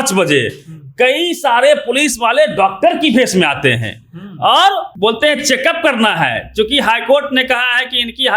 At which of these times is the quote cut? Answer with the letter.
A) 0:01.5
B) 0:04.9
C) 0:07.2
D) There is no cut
B